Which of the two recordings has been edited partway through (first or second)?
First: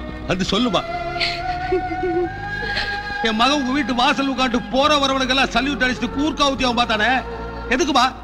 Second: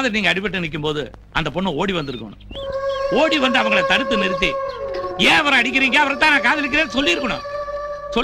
first